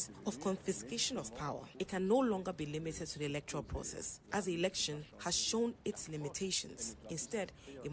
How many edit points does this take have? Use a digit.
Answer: 1